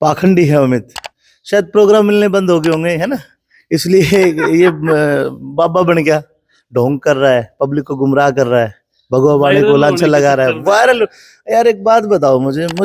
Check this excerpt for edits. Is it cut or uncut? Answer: uncut